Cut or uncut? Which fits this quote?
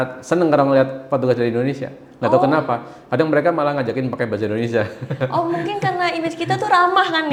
uncut